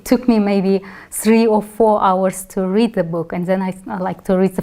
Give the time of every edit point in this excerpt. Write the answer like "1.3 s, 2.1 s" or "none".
none